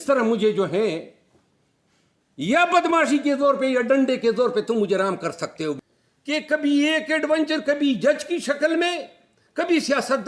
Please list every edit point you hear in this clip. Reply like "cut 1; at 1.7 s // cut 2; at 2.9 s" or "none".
cut 1; at 5.8 s